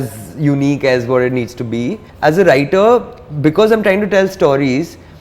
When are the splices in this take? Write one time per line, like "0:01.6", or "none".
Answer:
0:02.1